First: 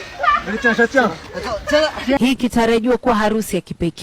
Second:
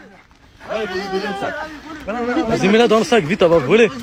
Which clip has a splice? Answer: first; 1 cut; at 2.2 s

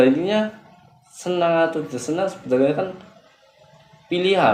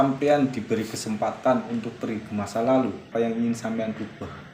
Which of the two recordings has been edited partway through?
second; 1 cut; at 3.0 s

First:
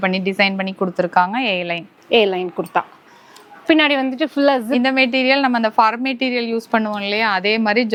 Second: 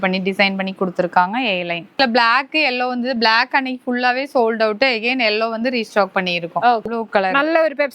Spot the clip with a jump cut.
second; 2 cuts; at 2.0 s, 6.9 s

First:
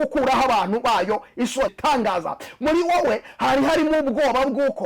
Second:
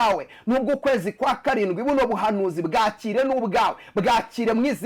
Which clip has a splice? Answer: first; 1 cut; at 1.8 s

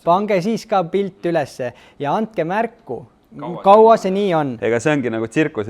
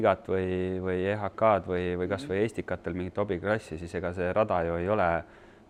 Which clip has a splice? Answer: first; 1 cut; at 4.5 s

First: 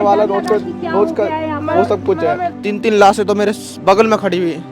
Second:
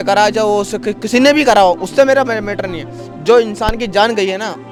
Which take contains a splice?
first; 1 cut; at 2.5 s

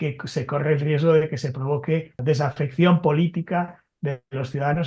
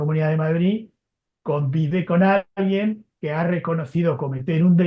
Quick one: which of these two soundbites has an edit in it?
first; 1 cut; at 2.2 s

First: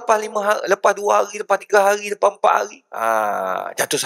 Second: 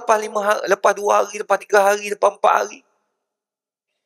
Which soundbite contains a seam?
first; 1 cut; at 2.8 s

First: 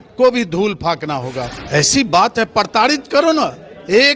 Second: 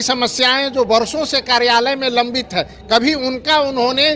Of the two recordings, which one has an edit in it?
first; 1 cut; at 1.5 s

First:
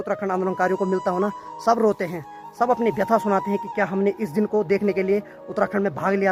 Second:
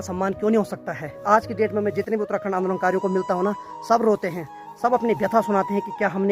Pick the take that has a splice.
second; 1 cut; at 1.2 s

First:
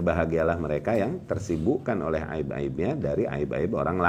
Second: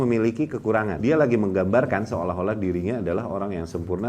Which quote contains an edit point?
second; 1 cut; at 0.9 s

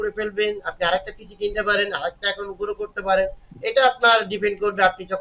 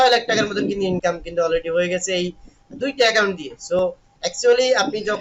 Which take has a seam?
second; 2 cuts; at 1.0 s, 3.7 s

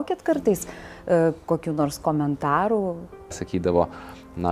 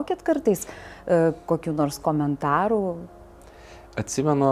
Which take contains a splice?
first; 1 cut; at 3.4 s

